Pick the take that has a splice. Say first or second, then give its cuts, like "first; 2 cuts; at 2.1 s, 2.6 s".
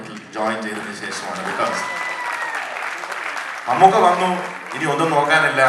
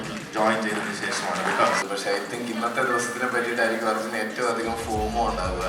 second; 1 cut; at 1.8 s